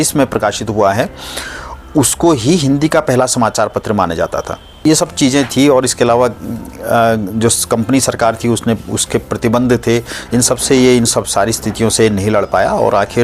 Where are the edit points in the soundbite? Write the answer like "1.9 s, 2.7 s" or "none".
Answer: 4.8 s